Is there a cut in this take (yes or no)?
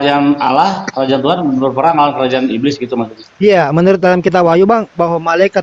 yes